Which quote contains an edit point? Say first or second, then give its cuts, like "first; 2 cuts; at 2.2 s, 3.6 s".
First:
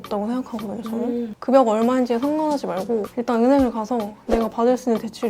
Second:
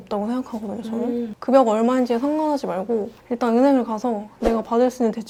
first; 1 cut; at 3.1 s